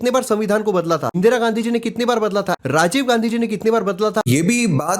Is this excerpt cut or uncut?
cut